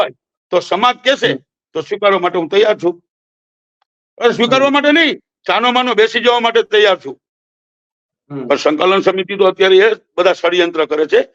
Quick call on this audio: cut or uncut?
uncut